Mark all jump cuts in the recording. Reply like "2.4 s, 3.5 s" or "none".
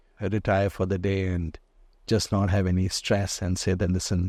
none